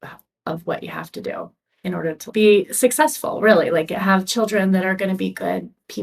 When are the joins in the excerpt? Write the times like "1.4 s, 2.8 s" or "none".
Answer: 2.3 s

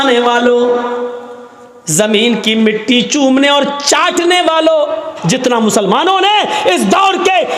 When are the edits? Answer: 5.1 s

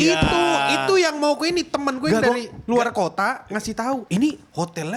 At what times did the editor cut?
none

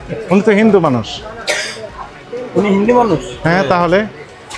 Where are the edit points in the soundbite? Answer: none

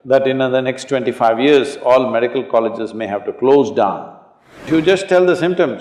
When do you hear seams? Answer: 4.7 s

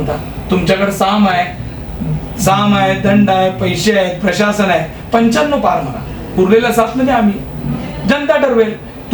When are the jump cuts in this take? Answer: none

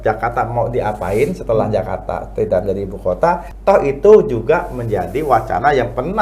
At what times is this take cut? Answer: 3.5 s

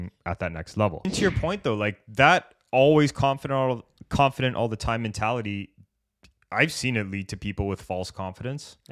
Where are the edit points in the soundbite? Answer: 1.1 s

